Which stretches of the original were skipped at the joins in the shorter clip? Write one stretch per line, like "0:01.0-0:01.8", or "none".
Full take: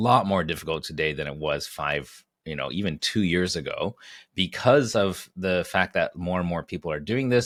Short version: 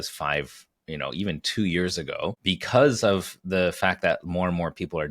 0:04.0-0:04.3